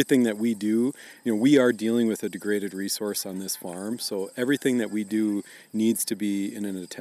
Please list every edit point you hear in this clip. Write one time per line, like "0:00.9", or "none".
none